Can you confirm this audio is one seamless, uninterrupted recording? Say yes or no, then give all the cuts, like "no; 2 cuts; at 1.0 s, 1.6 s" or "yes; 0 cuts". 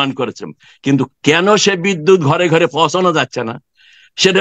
yes; 0 cuts